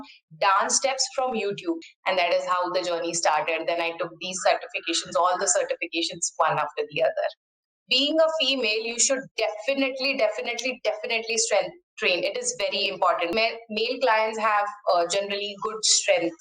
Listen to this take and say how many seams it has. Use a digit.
3